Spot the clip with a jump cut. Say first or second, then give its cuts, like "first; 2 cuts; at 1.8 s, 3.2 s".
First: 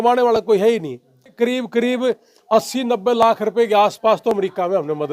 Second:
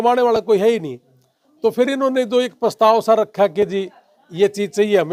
first; 1 cut; at 1.3 s